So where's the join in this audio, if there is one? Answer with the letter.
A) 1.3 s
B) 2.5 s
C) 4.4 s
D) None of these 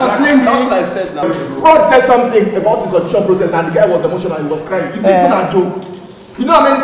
A